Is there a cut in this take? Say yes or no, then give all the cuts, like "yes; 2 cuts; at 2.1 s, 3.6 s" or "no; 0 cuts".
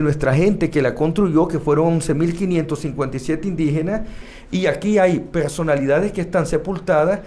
yes; 1 cut; at 4.3 s